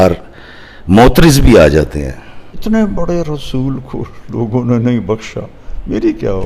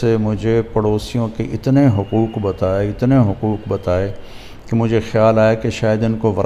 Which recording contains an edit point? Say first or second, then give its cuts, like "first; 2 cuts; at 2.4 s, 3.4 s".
first; 1 cut; at 2.6 s